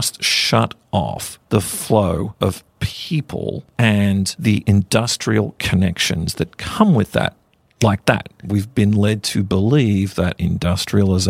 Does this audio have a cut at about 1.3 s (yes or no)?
yes